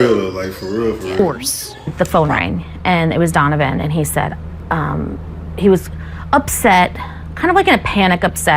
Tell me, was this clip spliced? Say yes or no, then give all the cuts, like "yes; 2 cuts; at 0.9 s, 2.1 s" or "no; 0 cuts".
yes; 1 cut; at 1.2 s